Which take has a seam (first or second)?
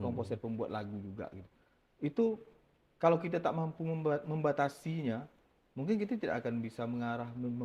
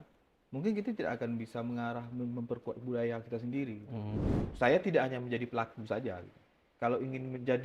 second